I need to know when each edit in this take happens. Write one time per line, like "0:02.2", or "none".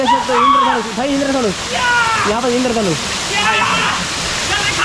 none